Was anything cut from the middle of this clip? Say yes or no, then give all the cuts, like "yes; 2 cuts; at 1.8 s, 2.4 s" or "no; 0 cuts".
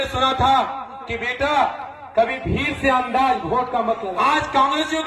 yes; 1 cut; at 4.1 s